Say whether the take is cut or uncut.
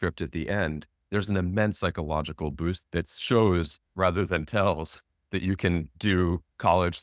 cut